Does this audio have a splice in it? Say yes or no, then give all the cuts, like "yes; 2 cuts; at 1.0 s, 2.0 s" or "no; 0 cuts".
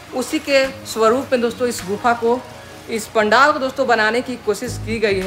no; 0 cuts